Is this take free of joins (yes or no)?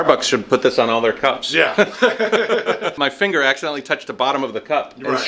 no